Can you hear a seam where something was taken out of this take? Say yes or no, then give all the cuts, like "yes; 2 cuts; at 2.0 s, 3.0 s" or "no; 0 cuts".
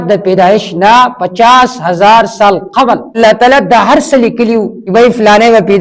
yes; 2 cuts; at 3.2 s, 4.8 s